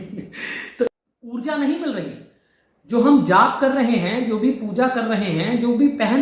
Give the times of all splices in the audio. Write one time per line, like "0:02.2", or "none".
0:01.1